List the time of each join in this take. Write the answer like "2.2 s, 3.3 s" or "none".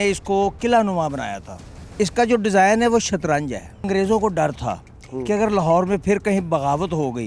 1.7 s, 3.9 s